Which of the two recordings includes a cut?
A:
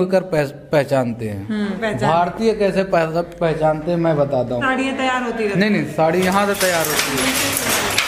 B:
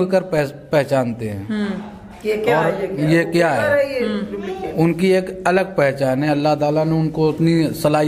A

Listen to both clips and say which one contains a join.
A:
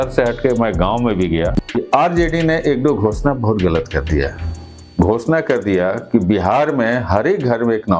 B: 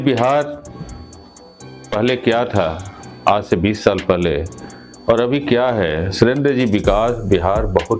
A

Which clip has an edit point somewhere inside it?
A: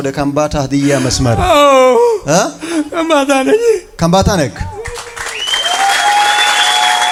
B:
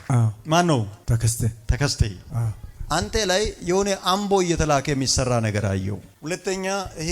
B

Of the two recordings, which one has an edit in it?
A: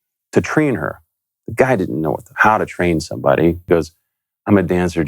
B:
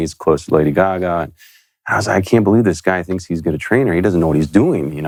A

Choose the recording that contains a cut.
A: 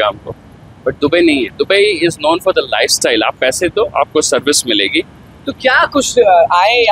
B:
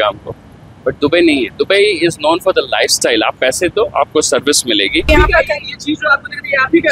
B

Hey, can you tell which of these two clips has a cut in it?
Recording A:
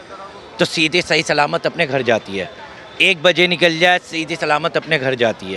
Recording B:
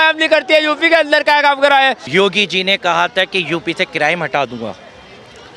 B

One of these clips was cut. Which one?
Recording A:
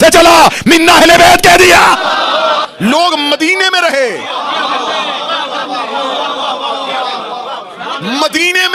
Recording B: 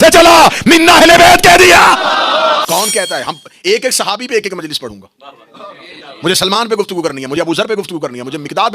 B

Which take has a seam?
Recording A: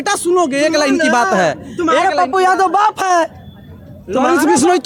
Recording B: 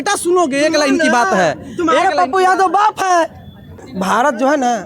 B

